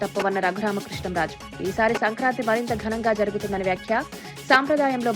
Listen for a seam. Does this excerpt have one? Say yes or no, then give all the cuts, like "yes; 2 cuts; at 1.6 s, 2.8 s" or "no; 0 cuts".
no; 0 cuts